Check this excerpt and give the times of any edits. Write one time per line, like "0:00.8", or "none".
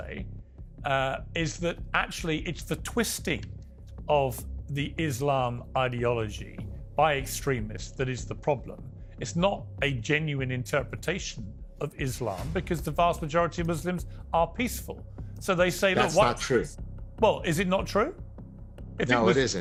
none